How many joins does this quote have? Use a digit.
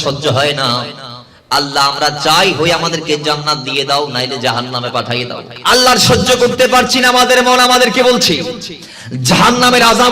1